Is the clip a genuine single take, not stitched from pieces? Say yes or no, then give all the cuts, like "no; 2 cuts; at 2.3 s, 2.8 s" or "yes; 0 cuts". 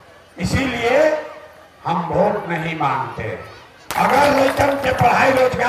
no; 1 cut; at 3.8 s